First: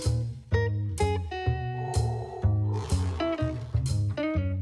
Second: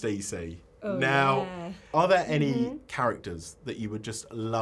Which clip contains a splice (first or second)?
second